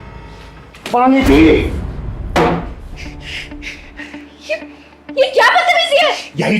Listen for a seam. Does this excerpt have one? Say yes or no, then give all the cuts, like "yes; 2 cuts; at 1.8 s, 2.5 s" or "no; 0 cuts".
yes; 1 cut; at 0.9 s